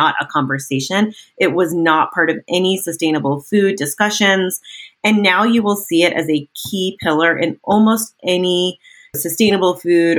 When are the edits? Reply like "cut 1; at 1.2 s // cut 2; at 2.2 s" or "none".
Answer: cut 1; at 9.2 s